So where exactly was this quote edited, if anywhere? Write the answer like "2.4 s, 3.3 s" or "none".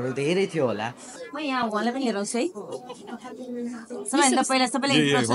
1.1 s